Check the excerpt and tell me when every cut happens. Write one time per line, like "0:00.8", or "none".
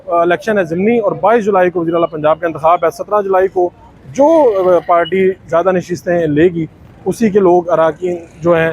none